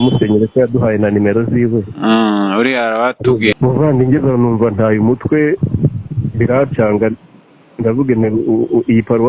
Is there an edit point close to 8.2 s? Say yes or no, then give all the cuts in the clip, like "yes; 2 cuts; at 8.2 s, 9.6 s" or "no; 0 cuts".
no; 1 cut; at 3.5 s